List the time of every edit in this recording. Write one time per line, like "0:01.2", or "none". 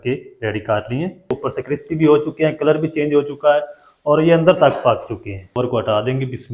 0:01.4
0:05.5